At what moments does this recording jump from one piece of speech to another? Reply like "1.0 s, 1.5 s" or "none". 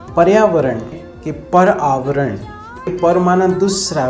1.0 s, 2.9 s